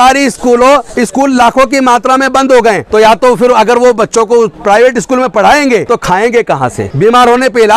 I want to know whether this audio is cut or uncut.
cut